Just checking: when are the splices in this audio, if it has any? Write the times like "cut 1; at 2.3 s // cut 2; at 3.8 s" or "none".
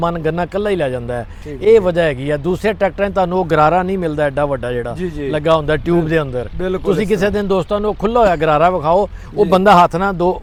none